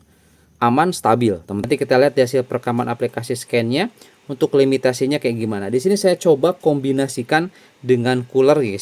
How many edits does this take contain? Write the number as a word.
one